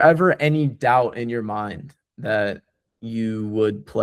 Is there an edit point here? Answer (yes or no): no